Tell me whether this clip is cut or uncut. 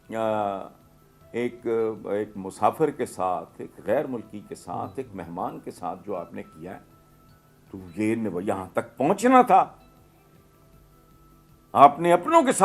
uncut